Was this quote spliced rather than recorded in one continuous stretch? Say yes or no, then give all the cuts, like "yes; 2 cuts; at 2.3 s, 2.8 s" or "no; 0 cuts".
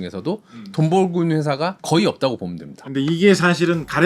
yes; 1 cut; at 2.9 s